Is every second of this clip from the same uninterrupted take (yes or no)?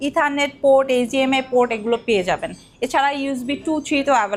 yes